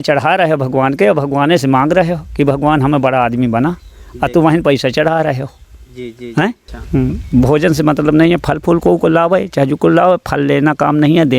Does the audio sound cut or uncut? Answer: cut